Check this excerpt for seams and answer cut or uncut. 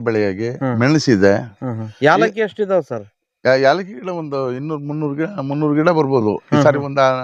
uncut